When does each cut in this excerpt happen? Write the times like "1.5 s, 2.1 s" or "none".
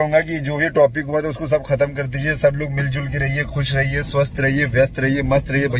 none